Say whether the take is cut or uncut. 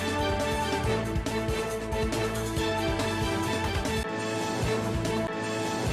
cut